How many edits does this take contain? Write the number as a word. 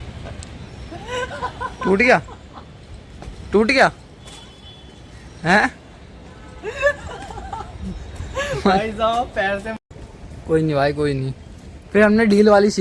one